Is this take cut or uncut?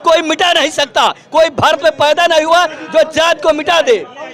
uncut